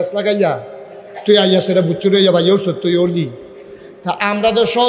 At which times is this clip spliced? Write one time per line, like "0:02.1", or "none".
none